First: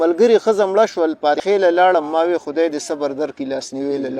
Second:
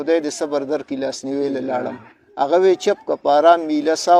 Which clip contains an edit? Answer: first; 1 cut; at 1.4 s

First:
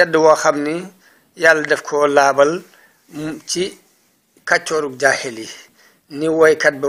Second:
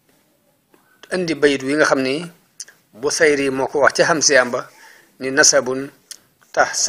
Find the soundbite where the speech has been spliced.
first; 1 cut; at 1.9 s

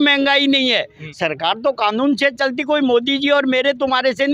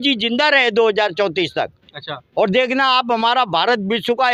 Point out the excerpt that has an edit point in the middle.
first; 1 cut; at 1.0 s

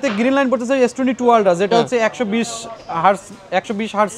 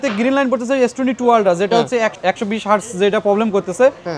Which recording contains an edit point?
second; 1 cut; at 2.1 s

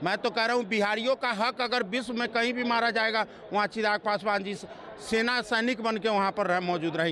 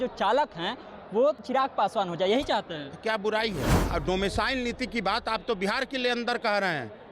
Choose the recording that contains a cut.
second; 2 cuts; at 1.4 s, 3.8 s

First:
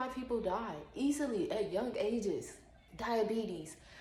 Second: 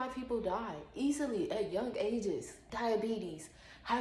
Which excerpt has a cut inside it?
second; 1 cut; at 2.6 s

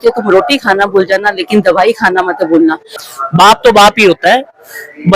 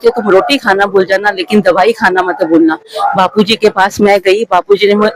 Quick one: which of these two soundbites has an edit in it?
first; 1 cut; at 2.9 s

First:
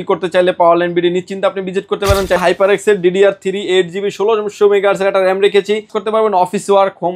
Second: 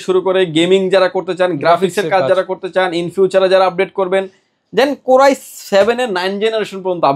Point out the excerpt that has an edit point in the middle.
first; 2 cuts; at 2.4 s, 6.0 s

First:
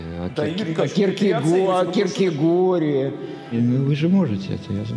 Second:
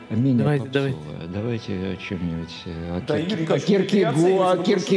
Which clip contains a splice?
first; 1 cut; at 3.5 s

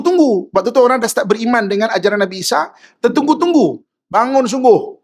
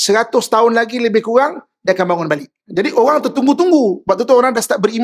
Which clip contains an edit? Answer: second; 1 cut; at 2.6 s

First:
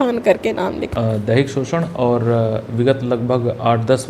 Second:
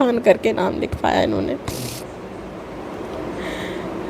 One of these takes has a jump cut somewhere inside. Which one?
first; 1 cut; at 0.9 s

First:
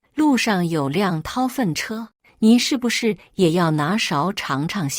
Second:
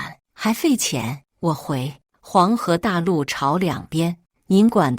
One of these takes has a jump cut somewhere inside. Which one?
second; 1 cut; at 1.6 s

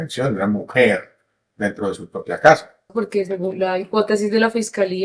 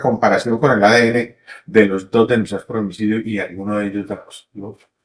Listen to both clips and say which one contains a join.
first; 1 cut; at 2.9 s

